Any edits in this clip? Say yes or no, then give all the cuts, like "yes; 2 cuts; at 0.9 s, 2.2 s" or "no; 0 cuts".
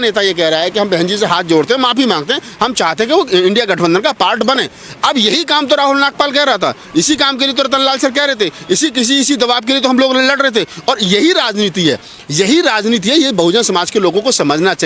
no; 0 cuts